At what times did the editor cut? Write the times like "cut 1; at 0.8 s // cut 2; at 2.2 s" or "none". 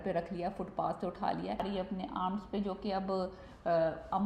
cut 1; at 1.7 s